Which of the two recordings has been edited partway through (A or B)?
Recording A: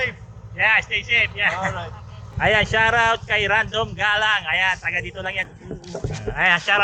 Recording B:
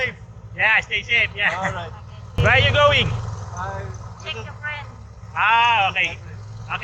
A